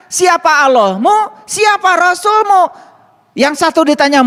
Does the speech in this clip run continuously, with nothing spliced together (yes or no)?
yes